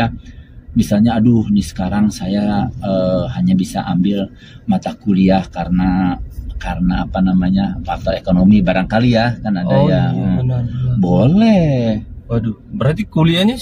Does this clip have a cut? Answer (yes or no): no